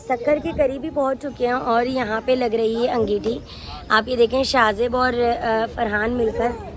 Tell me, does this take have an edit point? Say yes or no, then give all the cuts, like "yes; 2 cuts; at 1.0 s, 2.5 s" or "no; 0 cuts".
no; 0 cuts